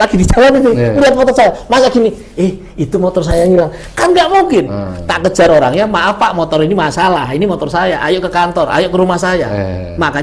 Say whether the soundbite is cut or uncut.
uncut